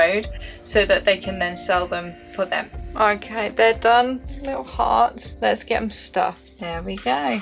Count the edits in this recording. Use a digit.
4